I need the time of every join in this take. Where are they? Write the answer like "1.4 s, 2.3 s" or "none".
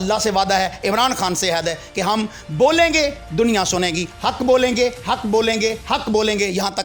none